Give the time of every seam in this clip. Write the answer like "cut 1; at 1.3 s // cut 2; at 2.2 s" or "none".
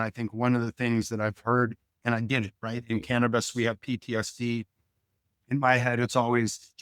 cut 1; at 2.0 s